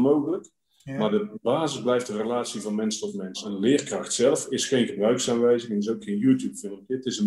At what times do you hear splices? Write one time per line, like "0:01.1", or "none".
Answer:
0:03.4